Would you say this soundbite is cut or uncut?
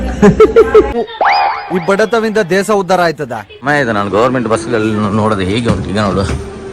uncut